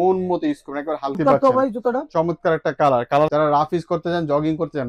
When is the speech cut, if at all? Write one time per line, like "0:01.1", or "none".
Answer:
0:01.2
0:03.3

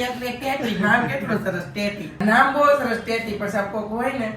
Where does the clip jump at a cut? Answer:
0:02.1

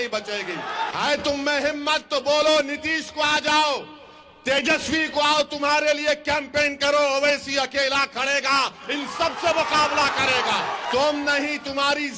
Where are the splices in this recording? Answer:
0:00.9
0:10.9

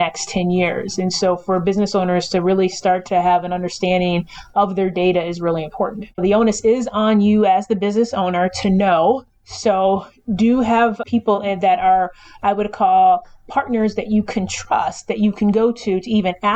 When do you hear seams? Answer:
0:06.2
0:11.0

